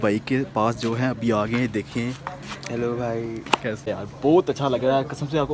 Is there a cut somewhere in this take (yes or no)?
yes